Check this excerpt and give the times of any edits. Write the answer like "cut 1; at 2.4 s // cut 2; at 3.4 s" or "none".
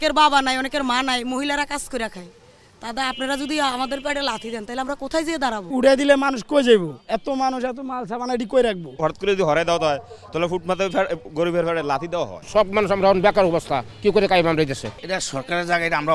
none